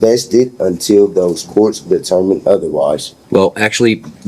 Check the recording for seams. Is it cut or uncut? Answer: cut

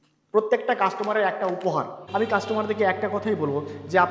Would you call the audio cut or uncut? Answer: cut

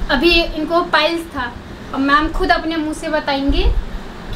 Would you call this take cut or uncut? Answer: cut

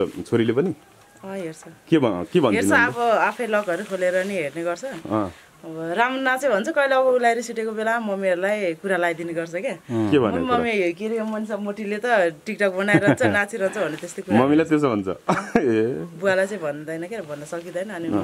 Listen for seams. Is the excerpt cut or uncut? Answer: uncut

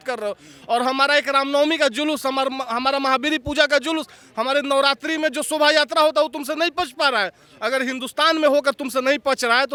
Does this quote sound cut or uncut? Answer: uncut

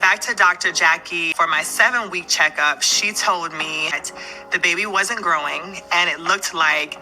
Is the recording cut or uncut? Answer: cut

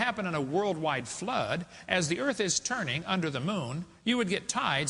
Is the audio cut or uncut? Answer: uncut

